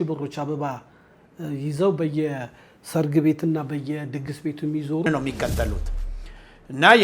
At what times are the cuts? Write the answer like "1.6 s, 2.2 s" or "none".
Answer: 5.1 s